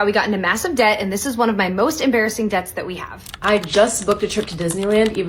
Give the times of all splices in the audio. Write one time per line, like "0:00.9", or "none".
0:03.2